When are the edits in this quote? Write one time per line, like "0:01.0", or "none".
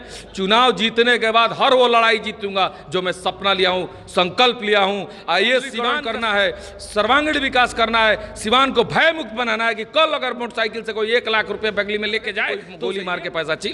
0:06.0
0:12.7